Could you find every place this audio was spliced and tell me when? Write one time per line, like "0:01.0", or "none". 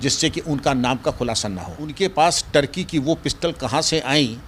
0:01.9